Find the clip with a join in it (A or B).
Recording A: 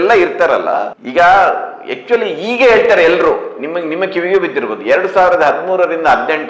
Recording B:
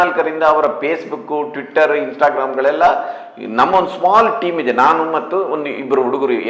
A